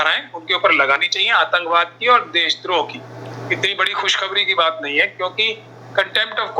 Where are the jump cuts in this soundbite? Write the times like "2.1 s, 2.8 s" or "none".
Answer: 3.3 s